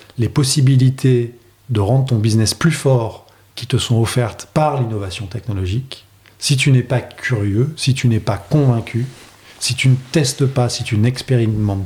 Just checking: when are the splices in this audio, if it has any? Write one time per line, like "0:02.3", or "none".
none